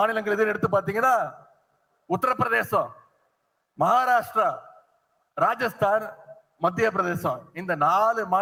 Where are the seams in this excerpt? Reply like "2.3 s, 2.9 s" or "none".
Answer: none